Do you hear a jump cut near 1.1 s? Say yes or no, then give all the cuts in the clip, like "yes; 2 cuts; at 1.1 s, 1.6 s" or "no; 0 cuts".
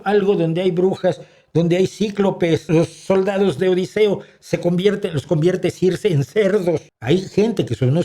no; 2 cuts; at 2.6 s, 6.9 s